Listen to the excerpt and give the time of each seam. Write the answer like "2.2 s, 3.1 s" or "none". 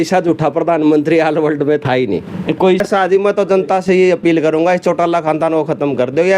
2.8 s